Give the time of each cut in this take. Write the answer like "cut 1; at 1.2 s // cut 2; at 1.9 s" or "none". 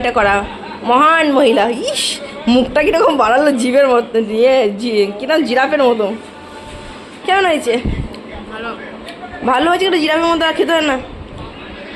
none